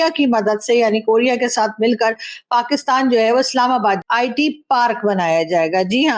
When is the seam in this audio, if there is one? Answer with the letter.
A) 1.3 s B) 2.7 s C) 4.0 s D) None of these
C